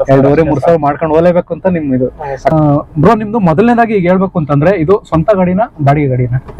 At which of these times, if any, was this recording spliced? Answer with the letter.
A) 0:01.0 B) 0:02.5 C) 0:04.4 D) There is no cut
B